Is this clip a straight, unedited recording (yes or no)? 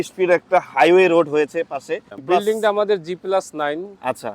no